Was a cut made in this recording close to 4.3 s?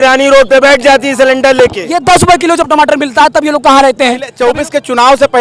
yes; 2 cuts; at 1.9 s, 4.3 s

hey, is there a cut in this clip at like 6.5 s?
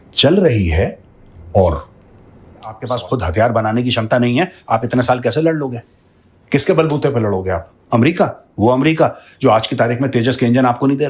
no; 1 cut; at 2.8 s

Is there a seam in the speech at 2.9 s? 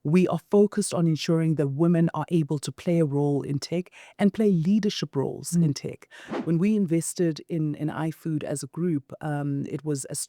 no; 1 cut; at 6.3 s

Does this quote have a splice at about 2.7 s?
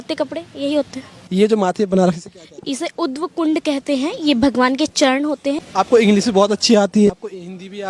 no; 3 cuts; at 1.2 s, 5.6 s, 7.1 s

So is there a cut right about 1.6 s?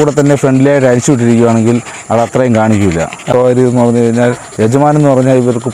no; 1 cut; at 3.3 s

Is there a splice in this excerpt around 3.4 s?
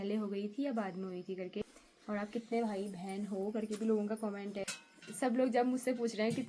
no; 2 cuts; at 1.6 s, 4.7 s

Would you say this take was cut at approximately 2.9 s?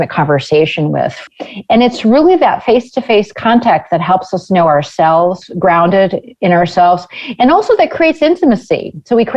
no; 2 cuts; at 1.2 s, 5.5 s

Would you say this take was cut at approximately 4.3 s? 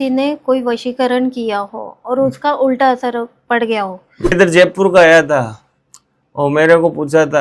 yes; 1 cut; at 4.3 s

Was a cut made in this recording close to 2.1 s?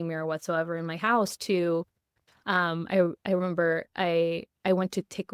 no; 0 cuts

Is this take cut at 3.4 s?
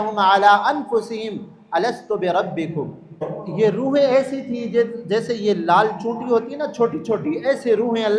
yes; 1 cut; at 3.4 s

